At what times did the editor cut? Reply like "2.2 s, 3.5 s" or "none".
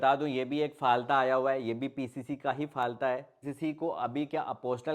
3.5 s